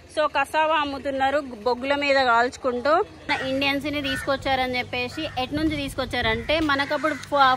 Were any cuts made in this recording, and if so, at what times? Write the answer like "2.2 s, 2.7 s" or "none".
3.3 s